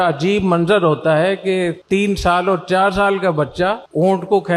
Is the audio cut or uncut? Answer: uncut